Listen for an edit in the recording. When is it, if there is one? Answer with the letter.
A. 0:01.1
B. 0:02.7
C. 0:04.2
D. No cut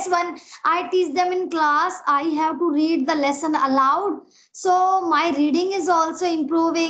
D